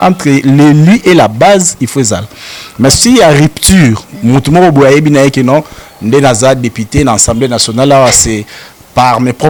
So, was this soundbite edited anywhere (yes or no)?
no